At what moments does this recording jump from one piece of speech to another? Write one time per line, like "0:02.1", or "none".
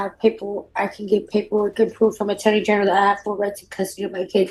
none